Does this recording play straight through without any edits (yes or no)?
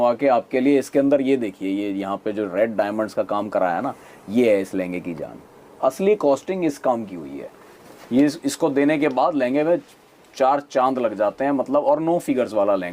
yes